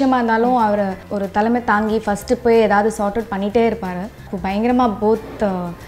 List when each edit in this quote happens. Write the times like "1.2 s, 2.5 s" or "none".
1.0 s, 4.3 s

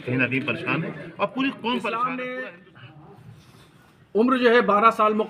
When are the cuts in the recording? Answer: 2.3 s

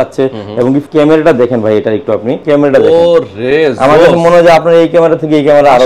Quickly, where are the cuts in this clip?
0.9 s, 2.4 s

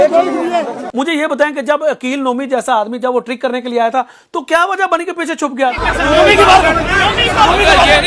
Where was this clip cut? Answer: 0.9 s

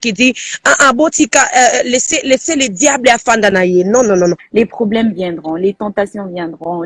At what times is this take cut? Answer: 4.4 s

